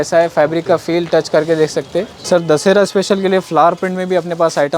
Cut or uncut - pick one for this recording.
cut